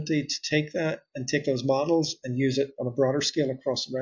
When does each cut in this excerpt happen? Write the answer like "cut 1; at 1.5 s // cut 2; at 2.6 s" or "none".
none